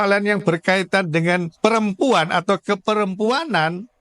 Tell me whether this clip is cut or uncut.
cut